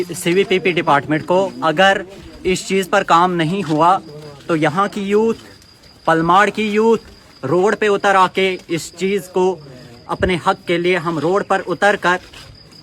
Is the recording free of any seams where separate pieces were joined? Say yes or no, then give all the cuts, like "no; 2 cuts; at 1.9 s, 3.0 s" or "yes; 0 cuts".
yes; 0 cuts